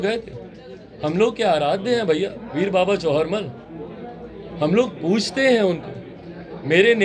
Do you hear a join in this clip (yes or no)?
no